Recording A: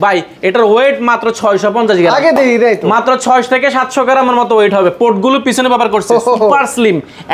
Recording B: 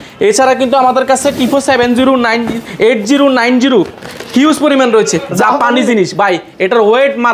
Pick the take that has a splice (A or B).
B